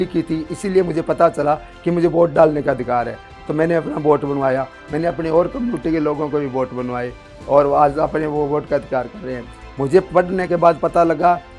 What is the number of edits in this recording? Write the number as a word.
zero